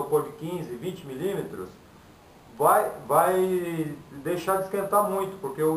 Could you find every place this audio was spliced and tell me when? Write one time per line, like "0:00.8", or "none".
none